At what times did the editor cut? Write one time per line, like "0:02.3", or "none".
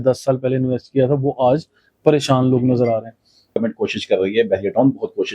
0:03.6